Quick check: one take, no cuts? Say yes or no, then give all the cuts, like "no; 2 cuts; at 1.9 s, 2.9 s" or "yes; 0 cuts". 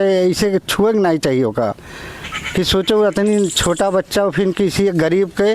yes; 0 cuts